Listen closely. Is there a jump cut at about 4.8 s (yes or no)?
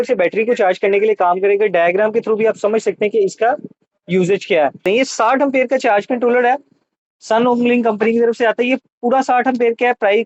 yes